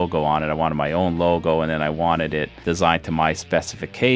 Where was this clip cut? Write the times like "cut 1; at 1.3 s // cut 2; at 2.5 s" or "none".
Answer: none